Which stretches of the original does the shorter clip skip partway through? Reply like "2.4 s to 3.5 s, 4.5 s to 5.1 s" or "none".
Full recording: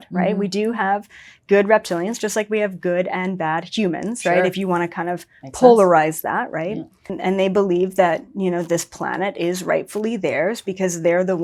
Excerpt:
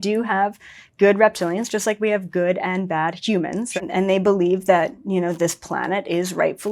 4.2 s to 7.0 s